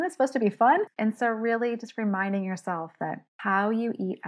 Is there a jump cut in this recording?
yes; 2 cuts; at 0.9 s, 3.3 s

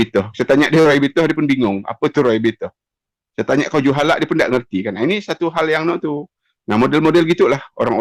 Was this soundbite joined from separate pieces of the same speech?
no; 0 cuts

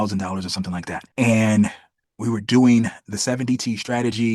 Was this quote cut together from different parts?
yes; 1 cut; at 1.0 s

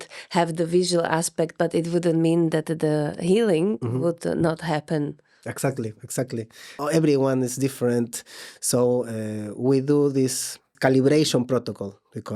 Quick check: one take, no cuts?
no; 2 cuts; at 6.7 s, 10.7 s

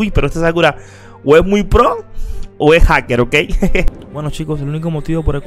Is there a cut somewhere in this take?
yes; 1 cut; at 3.8 s

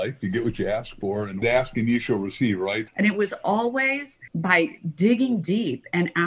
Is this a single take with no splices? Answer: no; 3 cuts; at 1.4 s, 2.8 s, 4.2 s

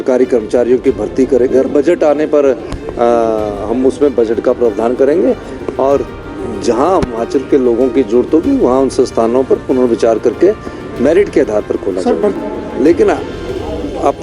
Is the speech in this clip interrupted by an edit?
yes; 1 cut; at 12.4 s

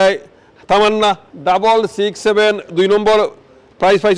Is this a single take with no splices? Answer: no; 1 cut; at 1.3 s

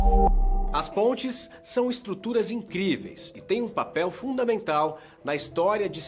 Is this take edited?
yes; 1 cut; at 4.6 s

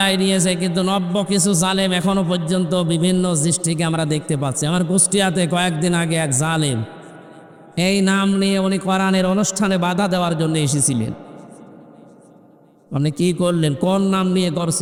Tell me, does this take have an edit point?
no; 0 cuts

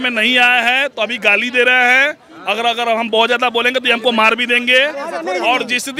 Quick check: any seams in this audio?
no; 0 cuts

